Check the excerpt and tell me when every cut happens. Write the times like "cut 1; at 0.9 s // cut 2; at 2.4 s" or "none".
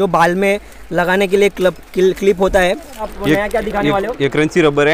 cut 1; at 3.1 s